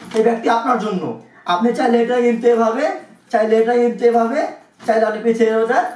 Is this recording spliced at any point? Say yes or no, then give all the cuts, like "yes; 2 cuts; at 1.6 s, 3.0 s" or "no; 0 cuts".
no; 0 cuts